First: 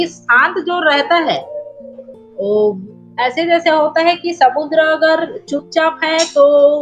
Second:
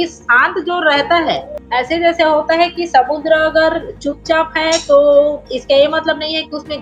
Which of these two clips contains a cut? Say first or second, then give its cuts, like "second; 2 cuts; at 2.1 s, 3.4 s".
second; 1 cut; at 1.5 s